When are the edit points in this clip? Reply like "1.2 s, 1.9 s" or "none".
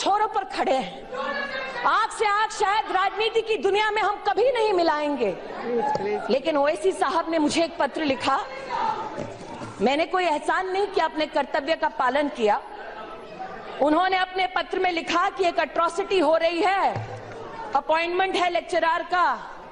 14.9 s